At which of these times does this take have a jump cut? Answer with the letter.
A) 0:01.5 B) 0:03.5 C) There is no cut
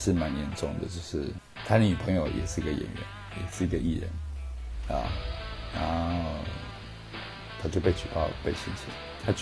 A